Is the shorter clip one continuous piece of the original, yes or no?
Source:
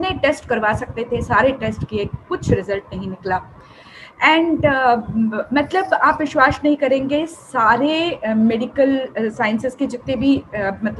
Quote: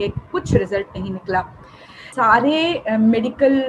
no